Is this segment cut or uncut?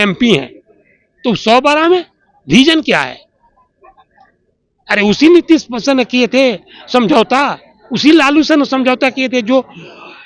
uncut